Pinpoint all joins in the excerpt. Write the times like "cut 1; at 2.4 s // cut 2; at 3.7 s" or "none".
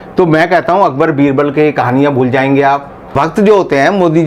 cut 1; at 3.1 s